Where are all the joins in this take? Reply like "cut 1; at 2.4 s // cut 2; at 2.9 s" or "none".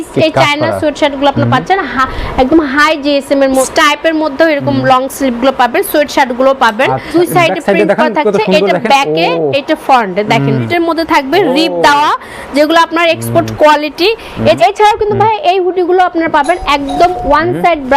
cut 1; at 3.7 s // cut 2; at 7.1 s // cut 3; at 10.6 s // cut 4; at 14.6 s